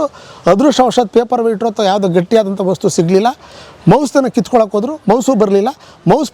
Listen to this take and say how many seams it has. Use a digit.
0